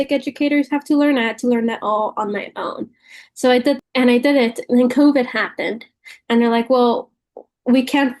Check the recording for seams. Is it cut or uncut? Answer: cut